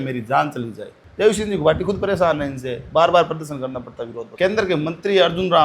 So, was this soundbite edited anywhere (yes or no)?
yes